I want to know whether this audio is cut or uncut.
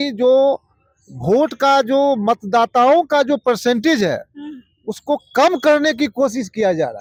uncut